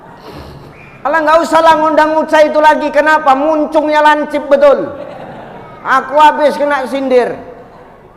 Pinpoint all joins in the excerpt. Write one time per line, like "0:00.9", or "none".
0:01.0